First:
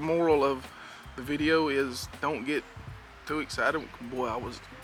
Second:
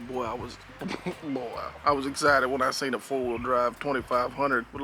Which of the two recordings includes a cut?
second; 1 cut; at 1.7 s

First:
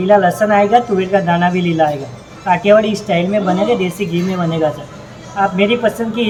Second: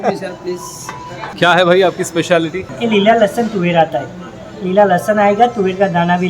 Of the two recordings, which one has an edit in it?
second; 2 cuts; at 1.2 s, 2.7 s

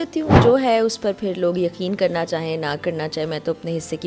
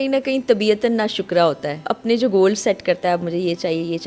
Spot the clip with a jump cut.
second; 1 cut; at 1.8 s

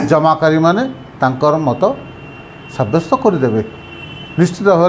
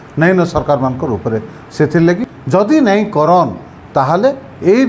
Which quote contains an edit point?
second; 1 cut; at 2.3 s

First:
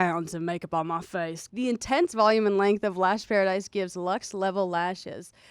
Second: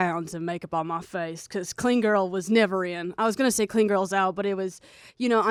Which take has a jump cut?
first; 1 cut; at 1.5 s

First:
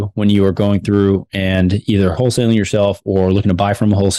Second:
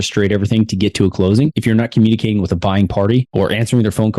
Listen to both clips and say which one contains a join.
second; 2 cuts; at 1.5 s, 3.3 s

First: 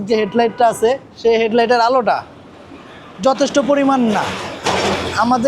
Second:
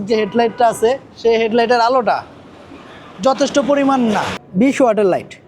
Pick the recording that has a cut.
second; 1 cut; at 4.4 s

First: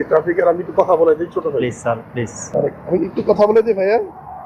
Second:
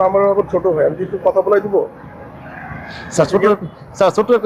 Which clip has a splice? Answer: first; 1 cut; at 2.4 s

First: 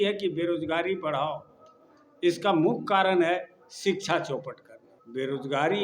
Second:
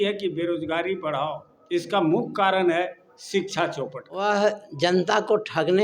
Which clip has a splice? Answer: second; 2 cuts; at 1.5 s, 4.2 s

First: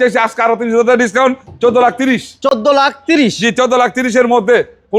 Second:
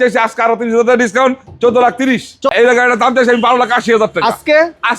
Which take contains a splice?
second; 1 cut; at 2.5 s

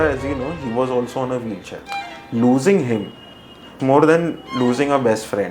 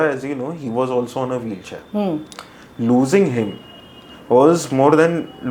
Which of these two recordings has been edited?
first; 2 cuts; at 1.8 s, 3.7 s

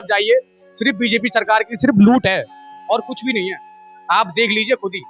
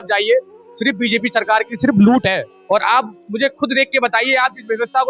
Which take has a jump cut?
second; 1 cut; at 2.5 s

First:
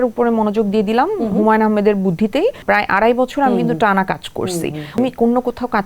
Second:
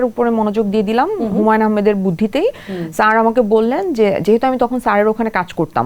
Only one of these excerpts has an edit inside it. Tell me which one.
first; 2 cuts; at 2.6 s, 5.0 s

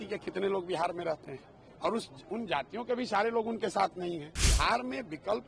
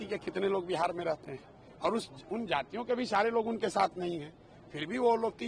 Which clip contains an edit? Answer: first; 1 cut; at 4.4 s

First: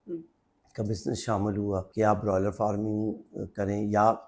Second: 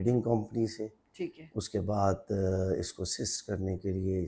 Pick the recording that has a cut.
first; 1 cut; at 1.9 s

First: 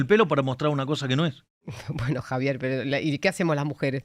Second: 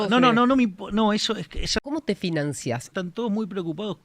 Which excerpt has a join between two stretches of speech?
second; 2 cuts; at 1.8 s, 2.9 s

